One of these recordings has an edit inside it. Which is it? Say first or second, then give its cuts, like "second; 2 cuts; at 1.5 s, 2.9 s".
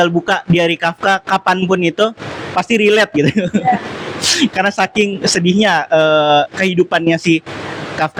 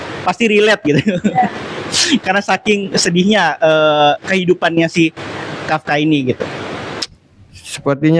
second; 1 cut; at 7.0 s